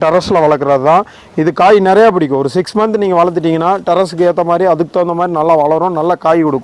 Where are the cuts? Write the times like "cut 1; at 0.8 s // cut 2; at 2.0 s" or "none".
none